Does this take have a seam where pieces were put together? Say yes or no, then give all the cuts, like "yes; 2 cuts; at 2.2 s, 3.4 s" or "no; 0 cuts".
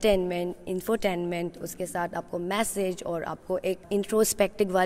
yes; 1 cut; at 3.8 s